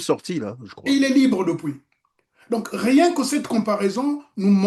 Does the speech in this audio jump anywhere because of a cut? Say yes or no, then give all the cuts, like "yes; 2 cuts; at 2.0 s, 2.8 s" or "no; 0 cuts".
no; 0 cuts